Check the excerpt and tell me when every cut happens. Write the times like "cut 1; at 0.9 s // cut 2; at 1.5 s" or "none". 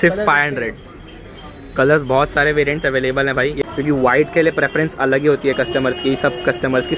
cut 1; at 3.6 s